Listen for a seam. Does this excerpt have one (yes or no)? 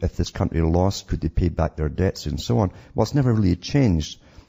no